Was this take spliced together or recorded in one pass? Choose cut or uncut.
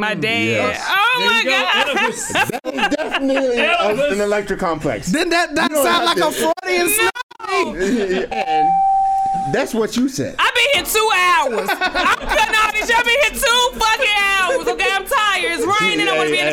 cut